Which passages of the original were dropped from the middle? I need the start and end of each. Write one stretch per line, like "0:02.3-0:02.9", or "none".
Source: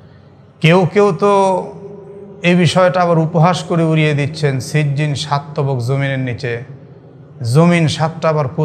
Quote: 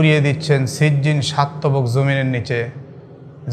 none

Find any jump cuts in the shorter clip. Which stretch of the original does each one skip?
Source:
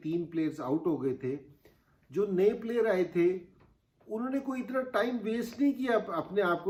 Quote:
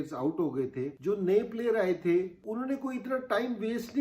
0:01.4-0:02.0
0:03.5-0:04.0

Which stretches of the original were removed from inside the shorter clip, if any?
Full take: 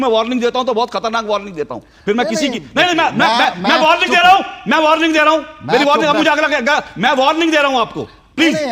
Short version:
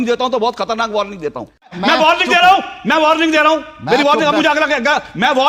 0:02.0-0:03.5

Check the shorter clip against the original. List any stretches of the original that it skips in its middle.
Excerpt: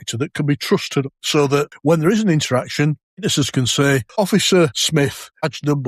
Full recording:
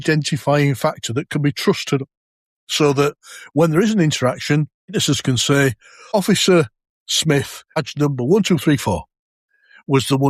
0:02.6-0:03.3
0:05.8-0:06.0
0:06.8-0:07.1

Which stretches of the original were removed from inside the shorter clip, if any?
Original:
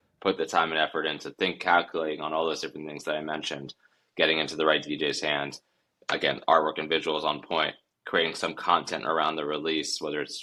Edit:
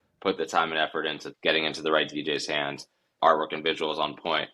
0:01.2-0:04.0
0:05.9-0:06.4

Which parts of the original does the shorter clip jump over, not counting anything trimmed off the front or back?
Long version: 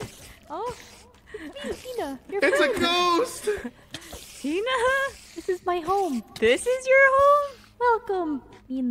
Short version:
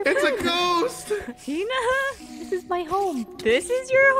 0:03.7-0:04.3

